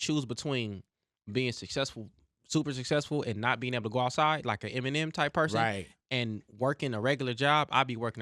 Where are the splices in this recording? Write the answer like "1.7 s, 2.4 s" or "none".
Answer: none